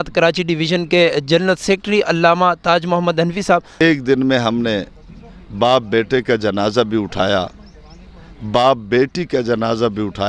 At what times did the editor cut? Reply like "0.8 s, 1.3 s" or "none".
3.8 s